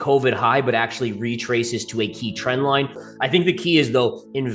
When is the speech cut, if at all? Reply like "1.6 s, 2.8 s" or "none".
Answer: 3.0 s